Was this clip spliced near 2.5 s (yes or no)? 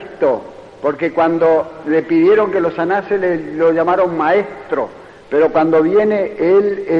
no